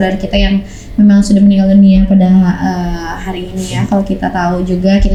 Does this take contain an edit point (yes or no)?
no